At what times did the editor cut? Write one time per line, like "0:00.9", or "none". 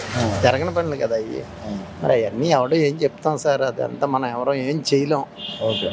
none